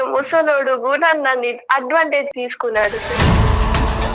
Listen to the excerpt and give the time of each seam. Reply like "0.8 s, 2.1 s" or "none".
2.3 s